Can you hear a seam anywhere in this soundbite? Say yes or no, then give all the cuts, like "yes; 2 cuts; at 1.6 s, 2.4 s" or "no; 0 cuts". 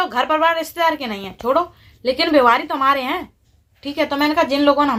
no; 0 cuts